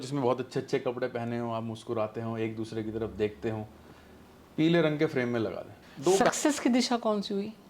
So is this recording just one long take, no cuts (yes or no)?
no